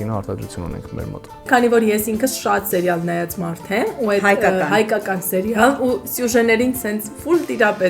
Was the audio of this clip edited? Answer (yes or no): yes